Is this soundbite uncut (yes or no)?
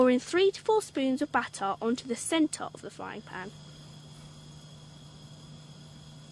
no